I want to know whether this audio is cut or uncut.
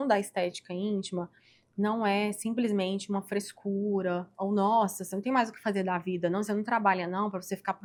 uncut